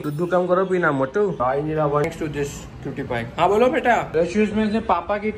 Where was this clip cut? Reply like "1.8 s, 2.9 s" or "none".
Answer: 2.0 s